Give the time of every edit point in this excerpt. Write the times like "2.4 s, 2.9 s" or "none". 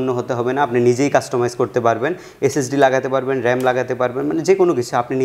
none